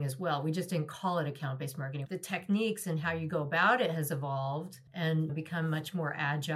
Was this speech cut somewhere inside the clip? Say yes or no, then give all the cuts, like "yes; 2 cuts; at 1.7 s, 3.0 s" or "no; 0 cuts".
yes; 2 cuts; at 1.9 s, 5.2 s